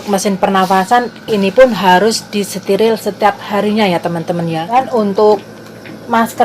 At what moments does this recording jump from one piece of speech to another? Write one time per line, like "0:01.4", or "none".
0:04.7